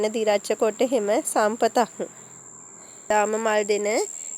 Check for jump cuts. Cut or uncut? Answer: cut